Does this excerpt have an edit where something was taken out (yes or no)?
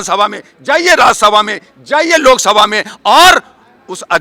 no